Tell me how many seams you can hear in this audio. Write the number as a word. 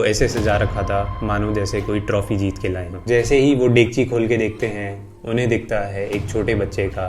one